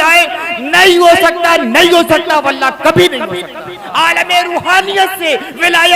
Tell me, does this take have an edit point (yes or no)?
yes